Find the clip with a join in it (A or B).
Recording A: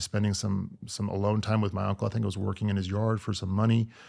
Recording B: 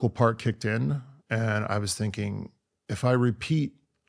B